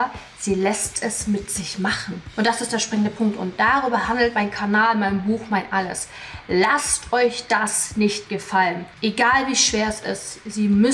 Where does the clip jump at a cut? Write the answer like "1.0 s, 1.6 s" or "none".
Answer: 8.9 s